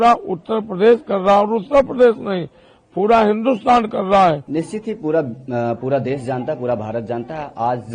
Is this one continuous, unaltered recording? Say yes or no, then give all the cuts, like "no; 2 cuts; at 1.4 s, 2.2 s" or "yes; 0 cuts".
no; 1 cut; at 4.4 s